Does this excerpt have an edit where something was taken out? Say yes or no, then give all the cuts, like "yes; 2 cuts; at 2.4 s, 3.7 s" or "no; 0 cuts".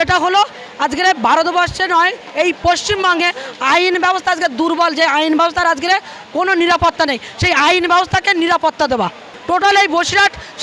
yes; 1 cut; at 9.3 s